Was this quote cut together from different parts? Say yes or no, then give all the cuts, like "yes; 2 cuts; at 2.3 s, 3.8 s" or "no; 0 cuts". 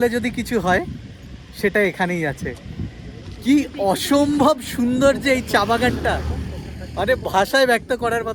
no; 0 cuts